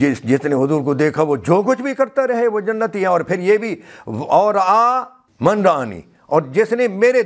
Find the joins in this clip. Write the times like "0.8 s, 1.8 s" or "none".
5.2 s